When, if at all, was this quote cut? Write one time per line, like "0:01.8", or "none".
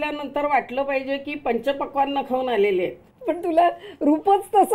0:03.1